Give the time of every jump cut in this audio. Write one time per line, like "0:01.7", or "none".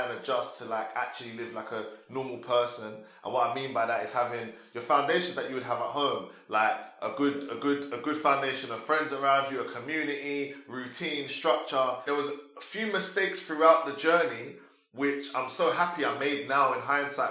0:12.0